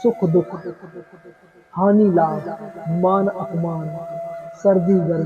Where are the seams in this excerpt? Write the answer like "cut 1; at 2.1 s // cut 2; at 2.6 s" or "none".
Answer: none